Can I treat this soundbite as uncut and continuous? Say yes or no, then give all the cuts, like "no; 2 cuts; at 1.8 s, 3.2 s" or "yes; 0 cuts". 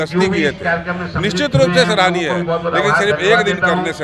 yes; 0 cuts